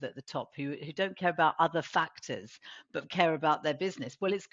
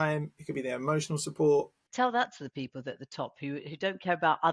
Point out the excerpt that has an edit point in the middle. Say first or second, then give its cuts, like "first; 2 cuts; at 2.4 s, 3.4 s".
second; 1 cut; at 1.8 s